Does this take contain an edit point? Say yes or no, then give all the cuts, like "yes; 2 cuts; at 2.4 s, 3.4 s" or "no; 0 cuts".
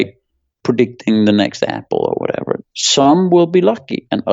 yes; 1 cut; at 2.6 s